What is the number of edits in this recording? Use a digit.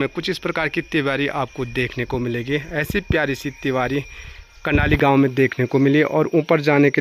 0